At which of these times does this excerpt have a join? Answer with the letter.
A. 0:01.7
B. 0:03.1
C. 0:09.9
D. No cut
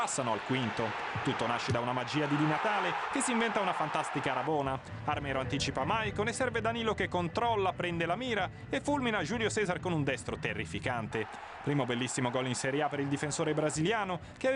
A